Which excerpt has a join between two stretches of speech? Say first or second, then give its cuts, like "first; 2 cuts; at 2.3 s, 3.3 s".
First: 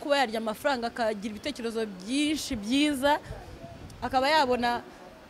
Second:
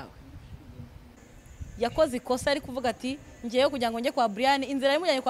second; 1 cut; at 1.2 s